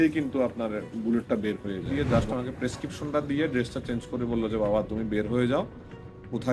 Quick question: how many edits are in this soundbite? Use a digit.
1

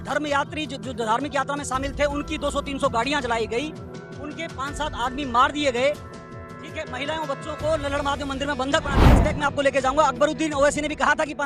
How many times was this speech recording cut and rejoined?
1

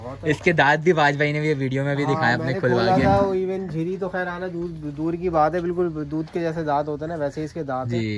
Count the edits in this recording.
0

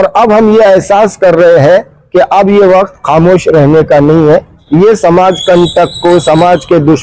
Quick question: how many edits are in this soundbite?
1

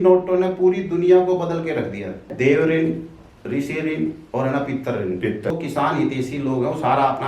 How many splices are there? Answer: 2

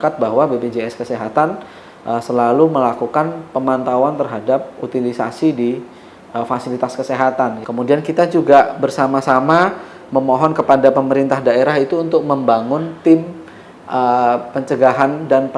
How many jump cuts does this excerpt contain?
1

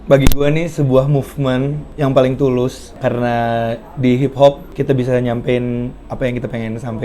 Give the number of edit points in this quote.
0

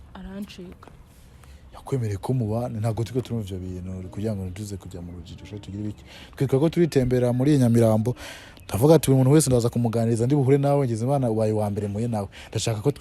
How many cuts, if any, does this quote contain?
0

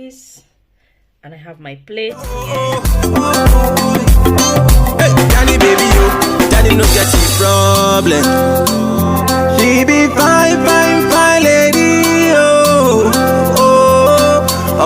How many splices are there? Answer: 1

